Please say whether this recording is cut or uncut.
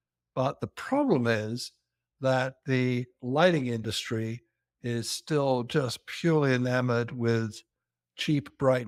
uncut